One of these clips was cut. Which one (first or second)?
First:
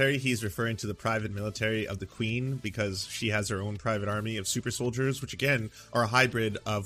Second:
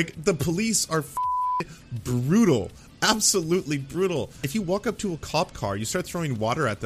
second